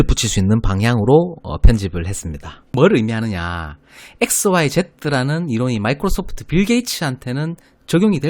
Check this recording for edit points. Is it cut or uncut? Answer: cut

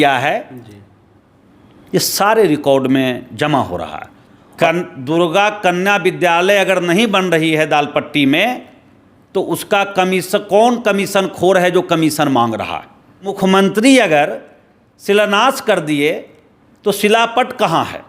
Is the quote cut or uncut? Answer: cut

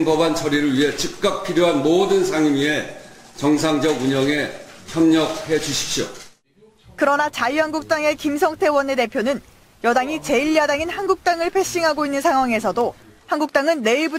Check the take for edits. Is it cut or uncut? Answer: cut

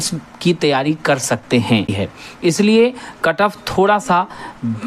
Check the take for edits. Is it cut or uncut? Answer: cut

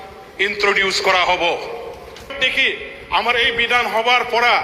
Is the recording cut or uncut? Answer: cut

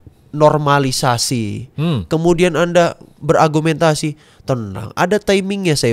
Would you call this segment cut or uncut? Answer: uncut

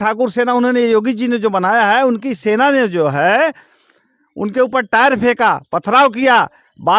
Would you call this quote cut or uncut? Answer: uncut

